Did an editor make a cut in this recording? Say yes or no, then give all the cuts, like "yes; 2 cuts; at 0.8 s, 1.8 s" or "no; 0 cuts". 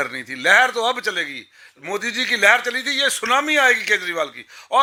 no; 0 cuts